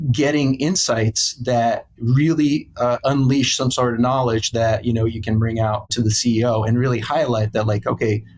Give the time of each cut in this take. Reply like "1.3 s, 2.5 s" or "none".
5.9 s